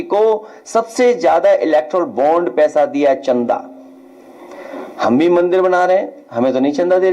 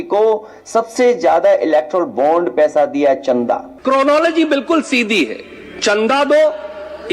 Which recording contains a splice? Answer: second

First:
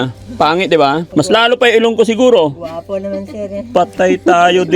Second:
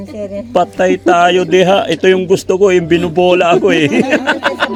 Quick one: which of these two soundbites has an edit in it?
first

